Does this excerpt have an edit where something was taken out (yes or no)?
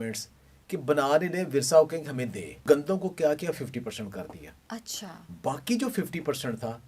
yes